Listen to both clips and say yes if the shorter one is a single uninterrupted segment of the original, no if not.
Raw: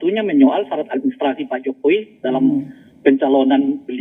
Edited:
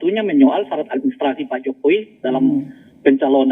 yes